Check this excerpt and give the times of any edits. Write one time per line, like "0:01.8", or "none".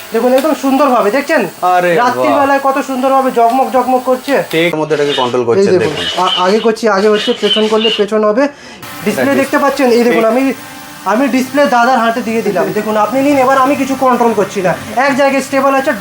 0:04.8
0:08.8